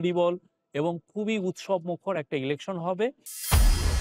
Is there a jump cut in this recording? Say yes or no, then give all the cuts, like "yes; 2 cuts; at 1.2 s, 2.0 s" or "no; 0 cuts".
no; 0 cuts